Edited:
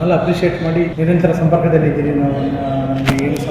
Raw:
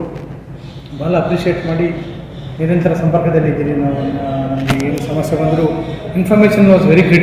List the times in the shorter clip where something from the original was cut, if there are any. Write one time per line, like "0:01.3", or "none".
0:00.9